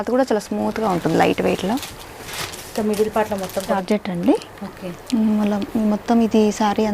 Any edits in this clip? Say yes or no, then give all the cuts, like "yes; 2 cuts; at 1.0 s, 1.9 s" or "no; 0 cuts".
yes; 1 cut; at 3.7 s